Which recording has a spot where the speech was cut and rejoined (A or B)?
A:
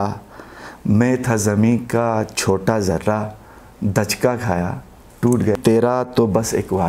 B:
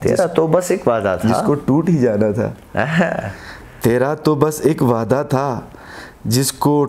A